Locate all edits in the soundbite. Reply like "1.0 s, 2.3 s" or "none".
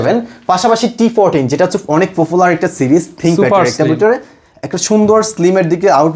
none